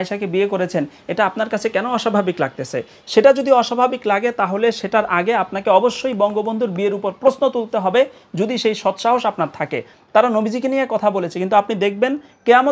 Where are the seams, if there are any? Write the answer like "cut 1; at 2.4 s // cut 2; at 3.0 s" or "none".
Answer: cut 1; at 9.9 s